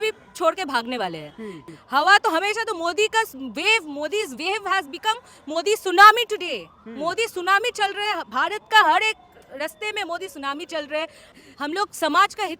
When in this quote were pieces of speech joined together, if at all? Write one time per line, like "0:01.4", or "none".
0:01.6
0:11.3